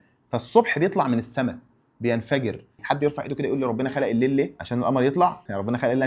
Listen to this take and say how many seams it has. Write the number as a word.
two